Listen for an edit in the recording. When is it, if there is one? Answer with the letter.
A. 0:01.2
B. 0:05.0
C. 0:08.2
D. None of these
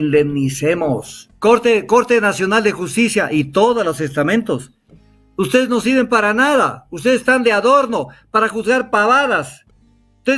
A